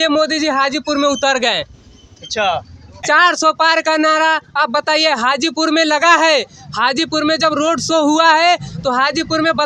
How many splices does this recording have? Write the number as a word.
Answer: one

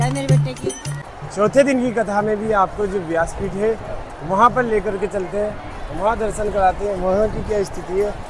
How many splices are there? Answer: one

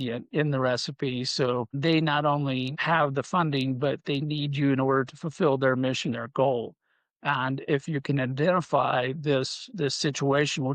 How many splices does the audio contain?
one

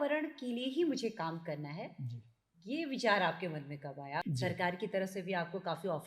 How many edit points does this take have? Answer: one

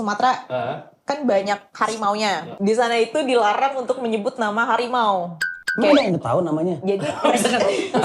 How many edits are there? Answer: zero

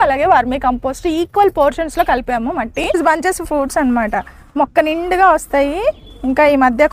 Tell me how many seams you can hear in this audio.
one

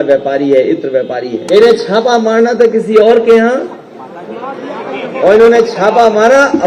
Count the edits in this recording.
one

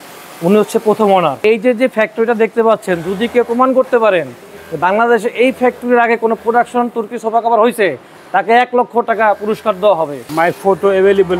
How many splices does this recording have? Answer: two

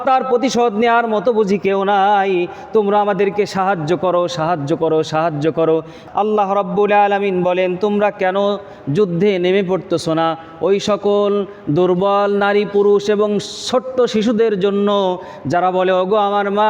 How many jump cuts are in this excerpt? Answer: one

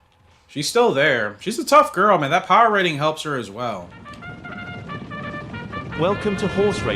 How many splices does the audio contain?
one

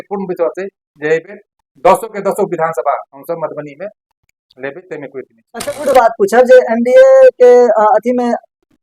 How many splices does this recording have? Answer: one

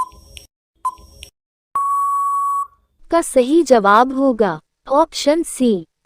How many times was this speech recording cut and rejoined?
one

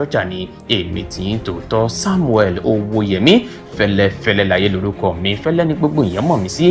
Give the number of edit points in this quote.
zero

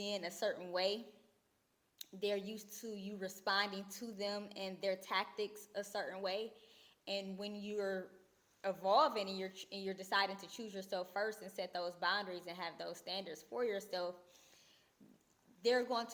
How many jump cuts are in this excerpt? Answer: zero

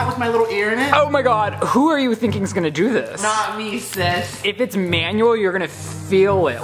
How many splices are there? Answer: two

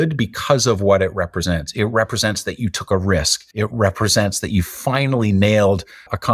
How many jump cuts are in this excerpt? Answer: one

